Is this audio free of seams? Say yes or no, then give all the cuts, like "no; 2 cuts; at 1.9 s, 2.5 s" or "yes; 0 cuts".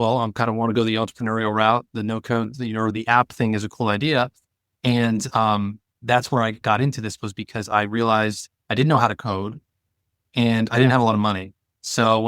no; 1 cut; at 2.9 s